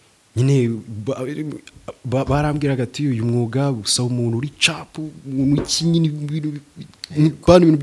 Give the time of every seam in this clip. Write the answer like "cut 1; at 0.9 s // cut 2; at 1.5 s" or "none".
none